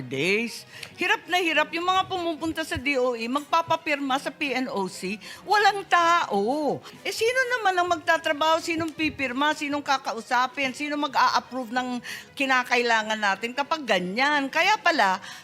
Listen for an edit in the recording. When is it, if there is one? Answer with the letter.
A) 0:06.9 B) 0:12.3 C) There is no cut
A